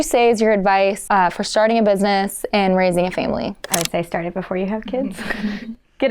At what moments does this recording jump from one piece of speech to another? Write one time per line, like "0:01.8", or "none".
0:01.0
0:03.6